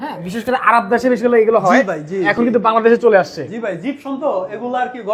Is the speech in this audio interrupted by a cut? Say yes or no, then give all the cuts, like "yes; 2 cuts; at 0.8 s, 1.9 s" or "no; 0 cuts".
no; 0 cuts